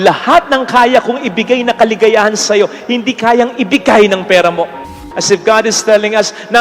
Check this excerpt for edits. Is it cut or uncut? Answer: cut